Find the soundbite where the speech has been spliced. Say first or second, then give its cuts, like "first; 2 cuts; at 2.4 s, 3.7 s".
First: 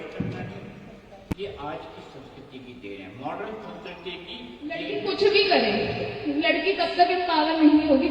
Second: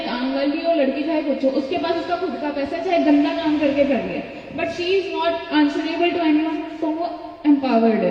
first; 2 cuts; at 1.2 s, 4.9 s